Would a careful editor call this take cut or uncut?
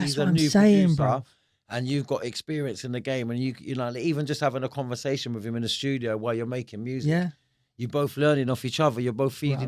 uncut